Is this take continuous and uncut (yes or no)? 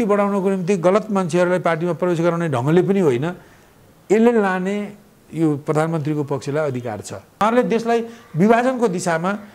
no